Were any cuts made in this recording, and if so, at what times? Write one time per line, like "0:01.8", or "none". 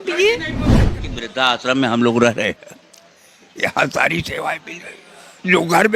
0:01.0